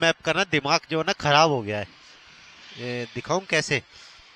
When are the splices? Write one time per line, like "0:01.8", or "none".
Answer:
none

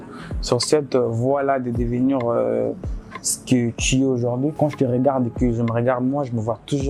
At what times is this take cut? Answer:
0:04.5

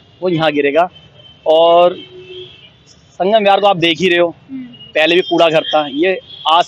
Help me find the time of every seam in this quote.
none

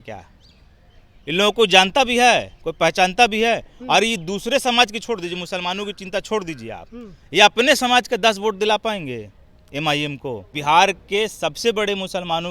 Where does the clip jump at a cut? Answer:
0:10.5

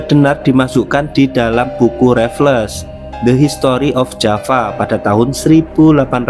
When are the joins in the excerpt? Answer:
none

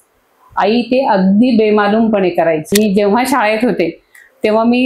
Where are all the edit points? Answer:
0:02.7

